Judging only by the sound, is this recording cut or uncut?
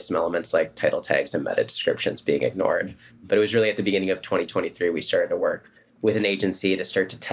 cut